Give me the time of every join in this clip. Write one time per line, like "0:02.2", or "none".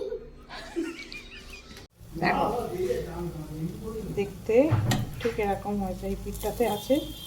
0:01.9